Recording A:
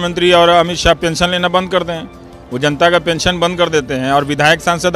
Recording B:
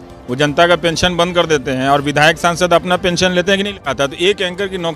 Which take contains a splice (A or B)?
B